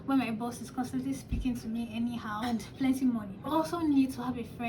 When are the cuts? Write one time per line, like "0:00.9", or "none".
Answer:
0:02.4
0:03.5